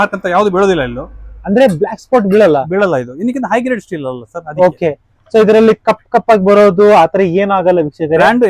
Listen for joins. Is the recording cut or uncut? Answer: uncut